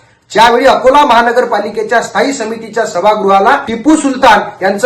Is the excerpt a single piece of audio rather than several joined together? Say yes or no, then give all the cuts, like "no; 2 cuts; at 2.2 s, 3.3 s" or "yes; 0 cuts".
no; 1 cut; at 3.7 s